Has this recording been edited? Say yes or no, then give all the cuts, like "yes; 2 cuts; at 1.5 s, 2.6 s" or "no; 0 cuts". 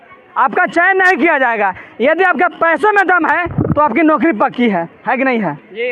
no; 0 cuts